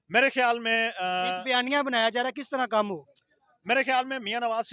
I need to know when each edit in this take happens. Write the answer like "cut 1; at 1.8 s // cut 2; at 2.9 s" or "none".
none

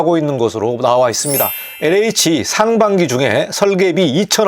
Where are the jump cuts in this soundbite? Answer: cut 1; at 1.6 s

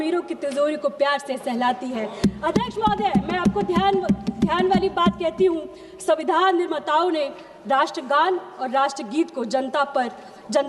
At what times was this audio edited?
none

